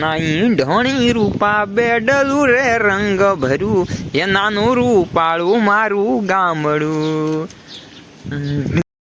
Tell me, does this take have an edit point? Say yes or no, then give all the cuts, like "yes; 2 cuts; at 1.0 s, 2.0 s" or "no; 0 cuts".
no; 0 cuts